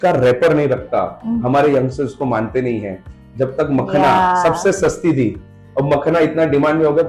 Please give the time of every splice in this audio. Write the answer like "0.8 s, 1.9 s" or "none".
none